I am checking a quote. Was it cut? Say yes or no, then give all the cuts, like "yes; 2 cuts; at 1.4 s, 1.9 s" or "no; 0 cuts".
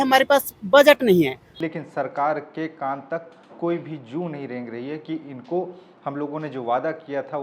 yes; 1 cut; at 1.4 s